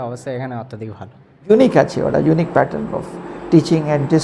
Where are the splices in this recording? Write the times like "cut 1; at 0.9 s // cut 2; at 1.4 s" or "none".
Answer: cut 1; at 1.5 s